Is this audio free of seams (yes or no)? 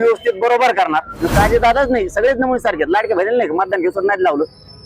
no